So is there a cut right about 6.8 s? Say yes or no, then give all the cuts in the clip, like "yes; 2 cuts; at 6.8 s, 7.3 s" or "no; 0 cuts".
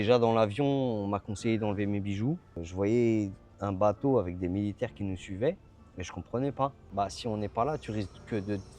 yes; 2 cuts; at 2.6 s, 6.8 s